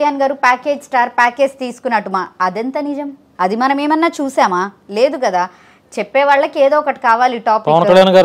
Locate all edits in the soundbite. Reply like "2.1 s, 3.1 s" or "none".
none